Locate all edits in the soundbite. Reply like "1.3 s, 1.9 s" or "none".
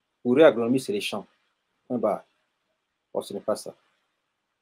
none